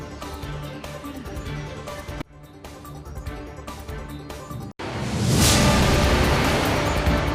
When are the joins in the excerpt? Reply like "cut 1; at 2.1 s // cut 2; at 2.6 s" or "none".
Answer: cut 1; at 4.7 s